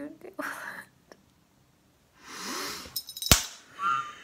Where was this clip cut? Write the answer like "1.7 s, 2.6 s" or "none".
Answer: 1.9 s